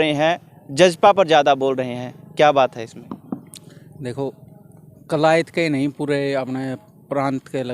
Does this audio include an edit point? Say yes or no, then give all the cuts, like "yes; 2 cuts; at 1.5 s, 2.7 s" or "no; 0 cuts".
no; 0 cuts